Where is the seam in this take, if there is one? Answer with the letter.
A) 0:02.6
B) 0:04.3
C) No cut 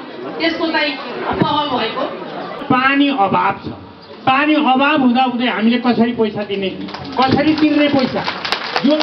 A